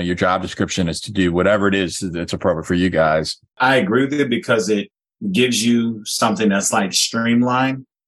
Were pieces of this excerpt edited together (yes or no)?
yes